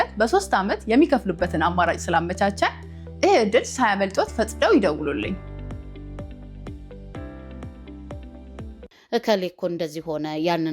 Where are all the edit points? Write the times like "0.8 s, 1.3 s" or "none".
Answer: 8.9 s